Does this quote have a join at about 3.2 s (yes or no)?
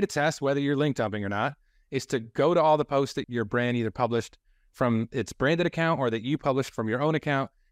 yes